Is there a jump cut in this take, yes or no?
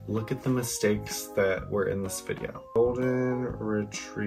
yes